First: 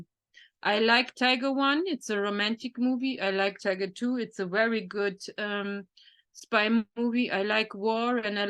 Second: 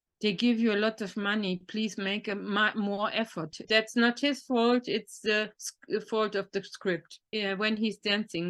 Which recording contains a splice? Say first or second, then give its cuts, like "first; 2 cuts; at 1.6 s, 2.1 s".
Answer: second; 2 cuts; at 3.6 s, 7.3 s